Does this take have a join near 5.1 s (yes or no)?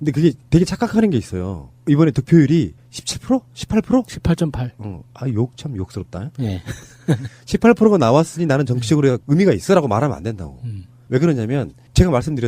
yes